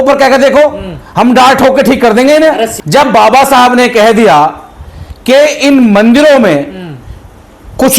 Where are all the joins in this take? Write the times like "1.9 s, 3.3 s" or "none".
2.7 s

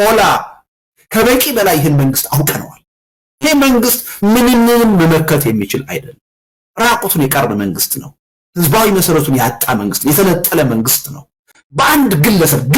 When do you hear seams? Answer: none

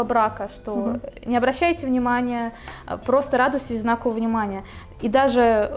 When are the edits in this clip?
none

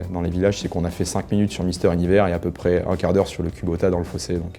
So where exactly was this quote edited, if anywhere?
none

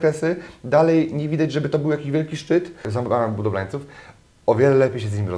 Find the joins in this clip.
2.9 s

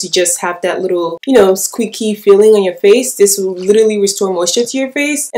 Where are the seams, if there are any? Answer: none

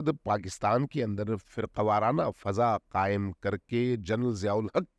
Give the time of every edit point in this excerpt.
none

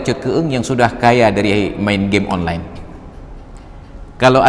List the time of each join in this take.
none

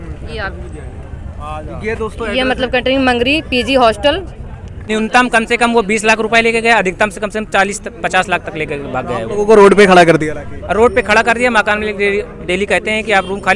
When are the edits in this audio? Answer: 4.7 s

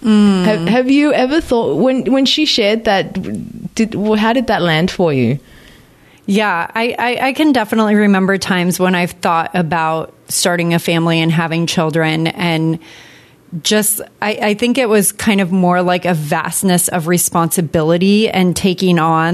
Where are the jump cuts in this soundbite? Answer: none

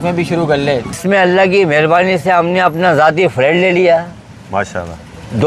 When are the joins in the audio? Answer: 0.9 s

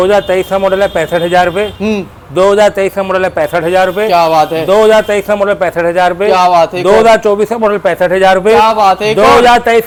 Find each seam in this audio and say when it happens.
none

